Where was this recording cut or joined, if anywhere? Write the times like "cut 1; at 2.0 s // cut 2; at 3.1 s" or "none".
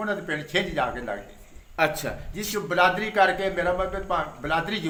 none